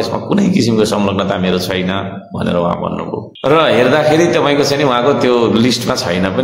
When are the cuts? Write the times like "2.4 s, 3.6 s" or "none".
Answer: 3.3 s